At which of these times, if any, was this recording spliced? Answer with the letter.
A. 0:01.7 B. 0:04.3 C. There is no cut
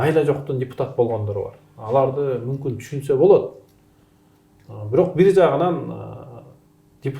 C